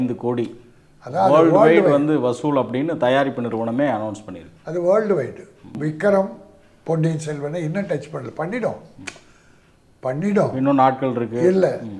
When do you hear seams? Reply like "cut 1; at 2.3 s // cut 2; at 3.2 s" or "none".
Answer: cut 1; at 5.8 s